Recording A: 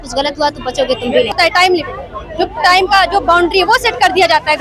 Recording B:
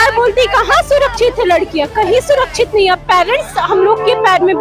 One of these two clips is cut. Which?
A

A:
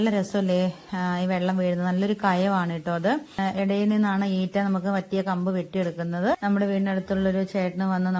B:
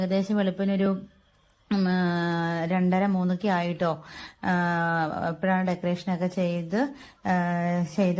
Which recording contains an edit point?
A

